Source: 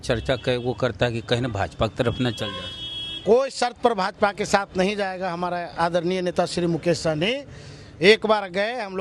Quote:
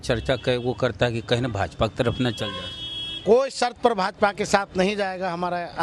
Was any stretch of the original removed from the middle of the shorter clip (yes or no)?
no